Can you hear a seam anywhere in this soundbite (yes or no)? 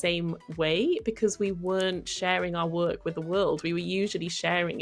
no